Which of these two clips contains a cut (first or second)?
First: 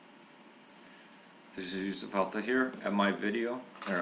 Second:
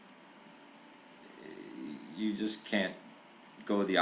second